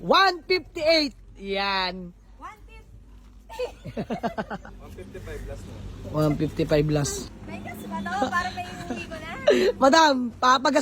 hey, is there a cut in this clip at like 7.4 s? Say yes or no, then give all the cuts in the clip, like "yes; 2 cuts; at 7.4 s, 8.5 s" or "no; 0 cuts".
yes; 2 cuts; at 4.5 s, 7.4 s